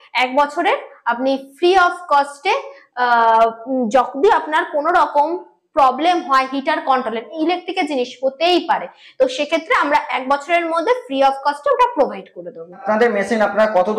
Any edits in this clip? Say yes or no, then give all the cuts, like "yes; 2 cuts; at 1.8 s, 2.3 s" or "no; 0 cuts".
no; 0 cuts